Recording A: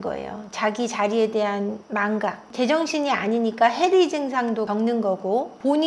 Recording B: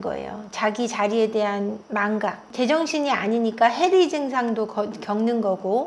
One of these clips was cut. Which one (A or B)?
A